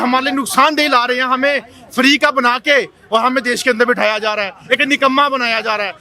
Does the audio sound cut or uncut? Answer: uncut